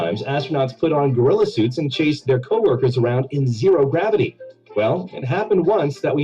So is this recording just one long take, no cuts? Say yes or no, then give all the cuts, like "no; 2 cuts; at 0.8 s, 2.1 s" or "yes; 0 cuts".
no; 2 cuts; at 1.0 s, 3.7 s